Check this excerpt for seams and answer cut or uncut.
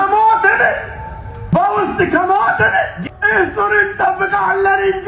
uncut